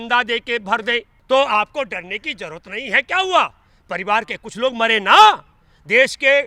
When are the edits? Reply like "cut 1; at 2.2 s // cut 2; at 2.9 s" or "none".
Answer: cut 1; at 1.1 s